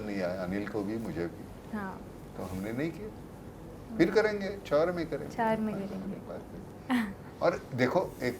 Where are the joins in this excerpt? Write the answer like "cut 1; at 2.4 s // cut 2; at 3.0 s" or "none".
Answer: none